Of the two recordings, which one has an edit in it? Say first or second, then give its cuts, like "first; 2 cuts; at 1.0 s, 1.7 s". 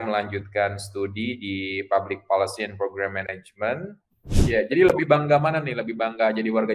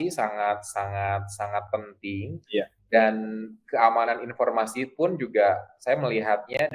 first; 1 cut; at 4.3 s